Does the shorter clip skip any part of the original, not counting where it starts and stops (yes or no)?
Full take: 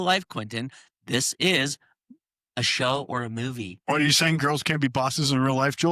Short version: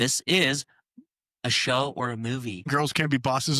yes